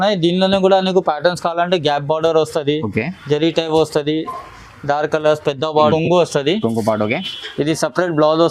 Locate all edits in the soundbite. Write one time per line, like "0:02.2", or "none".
0:05.9

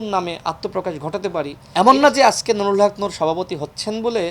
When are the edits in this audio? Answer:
0:01.6

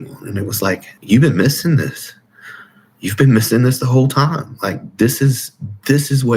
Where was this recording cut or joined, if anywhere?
0:00.9

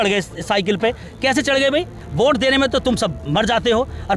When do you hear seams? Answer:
0:02.0

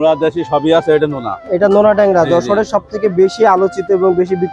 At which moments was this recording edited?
none

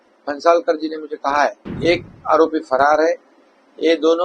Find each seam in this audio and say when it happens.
0:01.7

